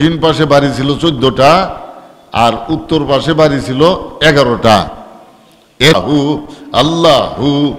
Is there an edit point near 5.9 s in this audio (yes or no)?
yes